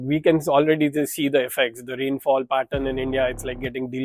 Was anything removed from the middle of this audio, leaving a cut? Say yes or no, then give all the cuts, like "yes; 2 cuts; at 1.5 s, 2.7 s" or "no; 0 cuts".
no; 0 cuts